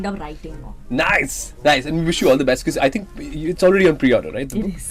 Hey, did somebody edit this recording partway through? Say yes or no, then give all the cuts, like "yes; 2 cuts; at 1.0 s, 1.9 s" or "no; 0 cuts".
no; 0 cuts